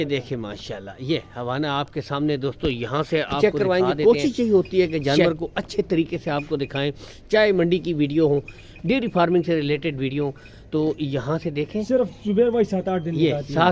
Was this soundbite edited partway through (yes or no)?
yes